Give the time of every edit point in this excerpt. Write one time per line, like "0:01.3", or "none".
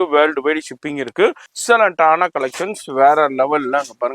0:01.5